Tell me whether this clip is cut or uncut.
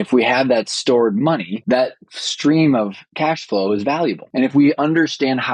cut